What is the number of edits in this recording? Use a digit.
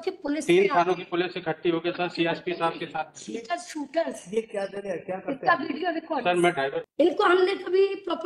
1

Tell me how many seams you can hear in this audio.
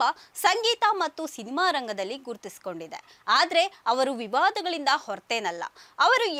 0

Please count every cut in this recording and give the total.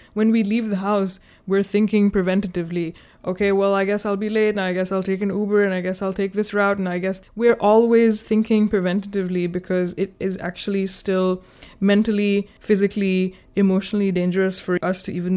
2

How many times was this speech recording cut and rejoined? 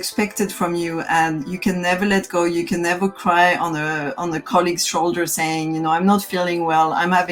0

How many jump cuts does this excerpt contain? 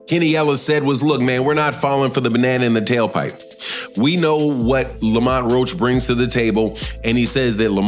0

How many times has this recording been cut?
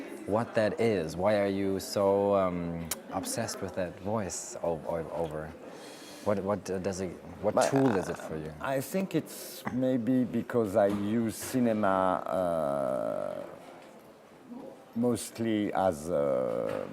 0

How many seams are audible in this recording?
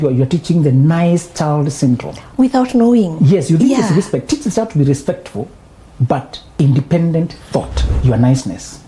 3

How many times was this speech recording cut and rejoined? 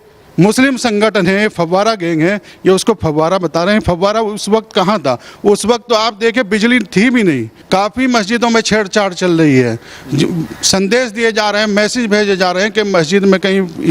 1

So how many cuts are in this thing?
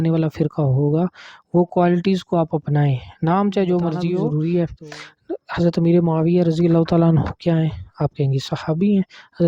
1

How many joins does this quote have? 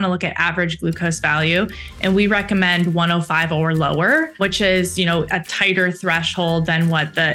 1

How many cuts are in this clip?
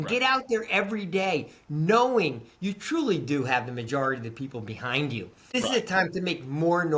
1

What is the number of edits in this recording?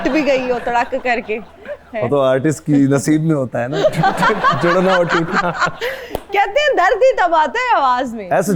0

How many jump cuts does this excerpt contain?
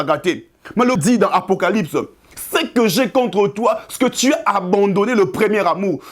1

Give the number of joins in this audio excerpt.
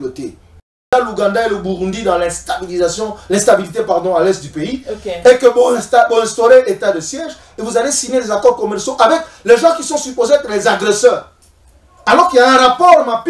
1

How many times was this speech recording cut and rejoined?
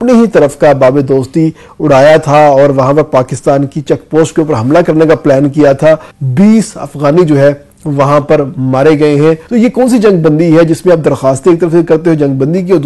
2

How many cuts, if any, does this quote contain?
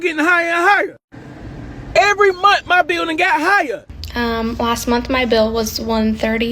1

